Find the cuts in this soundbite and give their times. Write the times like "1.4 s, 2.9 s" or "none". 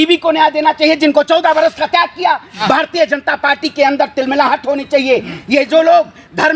2.6 s